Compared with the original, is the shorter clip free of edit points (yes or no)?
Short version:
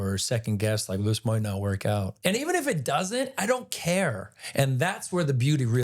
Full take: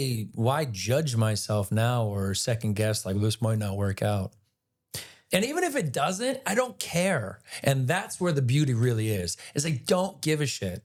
no